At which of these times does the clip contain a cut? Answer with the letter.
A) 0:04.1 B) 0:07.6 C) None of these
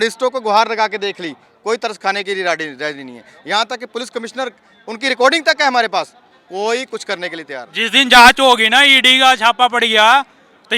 B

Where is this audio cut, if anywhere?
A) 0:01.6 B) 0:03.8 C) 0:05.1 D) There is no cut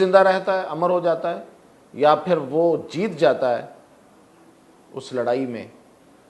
D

